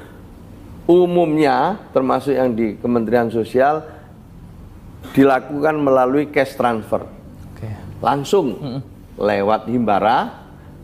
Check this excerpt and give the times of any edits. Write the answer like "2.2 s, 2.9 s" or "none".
none

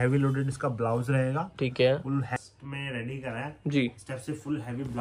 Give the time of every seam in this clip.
2.3 s

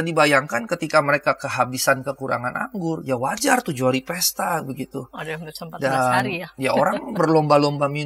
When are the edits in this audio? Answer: none

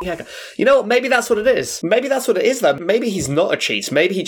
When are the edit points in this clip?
1.7 s, 2.8 s

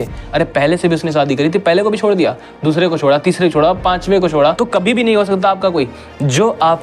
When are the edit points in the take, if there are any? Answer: 4.6 s

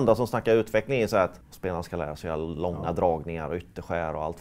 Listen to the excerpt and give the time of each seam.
1.5 s

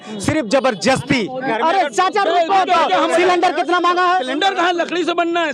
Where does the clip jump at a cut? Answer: 1.4 s

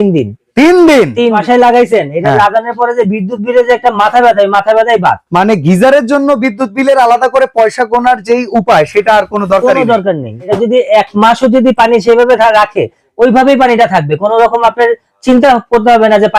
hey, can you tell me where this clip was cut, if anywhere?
1.4 s, 10.5 s

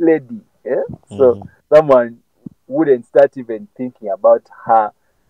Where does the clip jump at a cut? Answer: 1.5 s

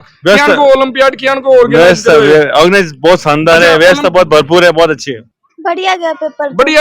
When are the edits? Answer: 5.1 s

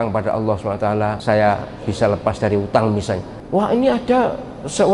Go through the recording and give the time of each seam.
1.2 s, 3.3 s

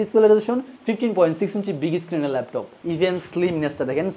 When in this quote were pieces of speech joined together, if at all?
2.7 s

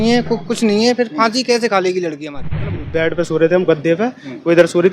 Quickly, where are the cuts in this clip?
2.8 s

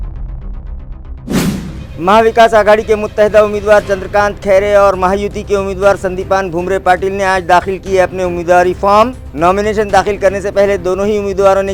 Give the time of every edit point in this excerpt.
1.8 s

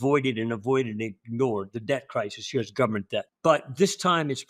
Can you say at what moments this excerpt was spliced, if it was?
3.3 s

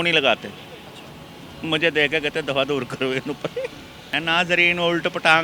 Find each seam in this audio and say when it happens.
4.1 s

